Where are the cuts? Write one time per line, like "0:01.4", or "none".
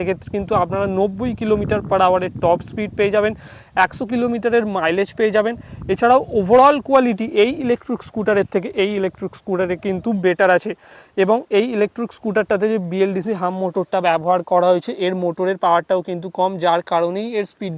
none